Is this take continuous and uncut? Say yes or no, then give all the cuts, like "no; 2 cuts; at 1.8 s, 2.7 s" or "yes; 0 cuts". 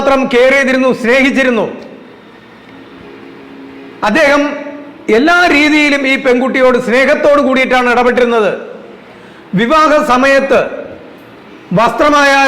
yes; 0 cuts